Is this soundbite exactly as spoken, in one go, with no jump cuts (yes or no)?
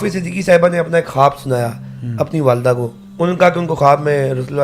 no